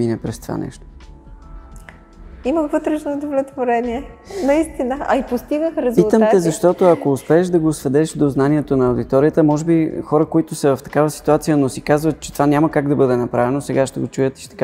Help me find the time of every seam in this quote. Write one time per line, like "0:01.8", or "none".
none